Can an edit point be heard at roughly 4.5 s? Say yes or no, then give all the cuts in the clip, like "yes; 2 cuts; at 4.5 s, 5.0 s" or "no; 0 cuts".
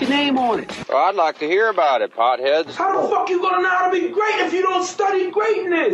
no; 1 cut; at 2.7 s